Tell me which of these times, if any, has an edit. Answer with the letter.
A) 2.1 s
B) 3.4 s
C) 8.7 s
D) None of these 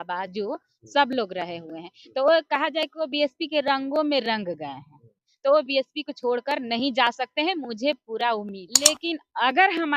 C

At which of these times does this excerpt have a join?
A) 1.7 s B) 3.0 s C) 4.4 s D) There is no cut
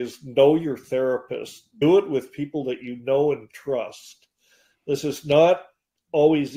A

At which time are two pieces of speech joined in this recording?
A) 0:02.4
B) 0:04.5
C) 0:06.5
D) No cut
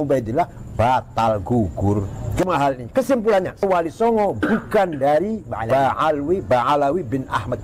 A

